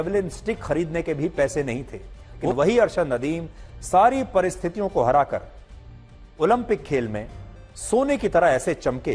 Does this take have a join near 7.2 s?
no; 1 cut; at 2.5 s

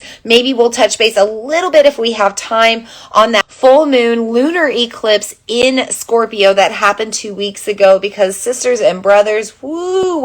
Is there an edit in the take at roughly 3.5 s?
yes; 1 cut; at 3.5 s

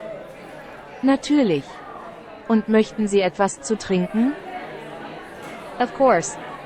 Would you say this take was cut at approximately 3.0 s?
no; 3 cuts; at 1.0 s, 4.3 s, 5.8 s

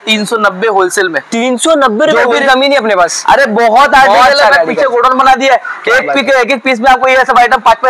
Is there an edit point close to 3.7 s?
no; 1 cut; at 2.4 s

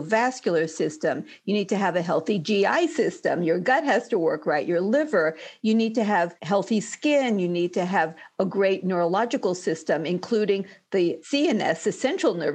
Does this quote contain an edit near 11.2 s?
yes; 1 cut; at 11.2 s

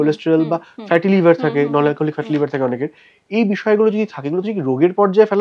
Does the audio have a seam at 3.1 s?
no; 0 cuts

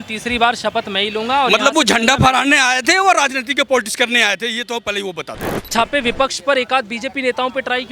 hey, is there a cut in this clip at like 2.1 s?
no; 1 cut; at 5.7 s

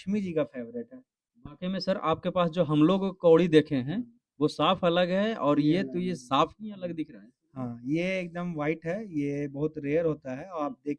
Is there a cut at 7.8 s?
no; 0 cuts

